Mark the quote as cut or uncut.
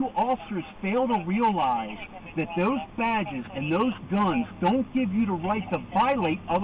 uncut